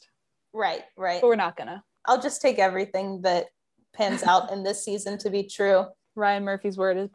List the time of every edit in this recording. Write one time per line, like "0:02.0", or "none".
0:01.9
0:06.0